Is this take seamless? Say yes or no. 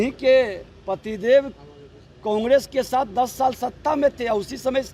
yes